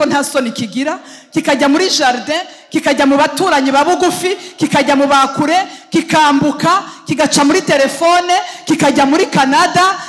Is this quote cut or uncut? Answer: uncut